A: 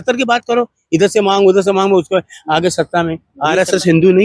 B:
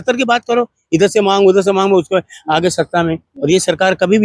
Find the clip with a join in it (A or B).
A